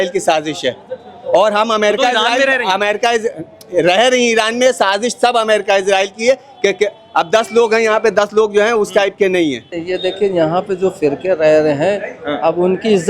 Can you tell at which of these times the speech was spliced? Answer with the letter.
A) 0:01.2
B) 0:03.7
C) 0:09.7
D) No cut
C